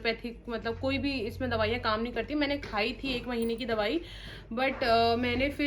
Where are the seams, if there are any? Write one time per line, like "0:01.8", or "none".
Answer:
none